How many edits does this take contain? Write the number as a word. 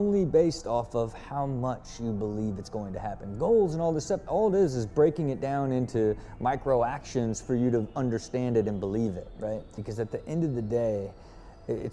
one